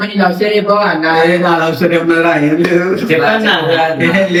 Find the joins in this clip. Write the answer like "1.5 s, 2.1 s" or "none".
none